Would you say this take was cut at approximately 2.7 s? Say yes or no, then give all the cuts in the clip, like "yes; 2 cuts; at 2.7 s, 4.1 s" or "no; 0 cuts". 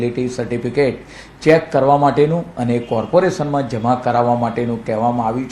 yes; 1 cut; at 2.7 s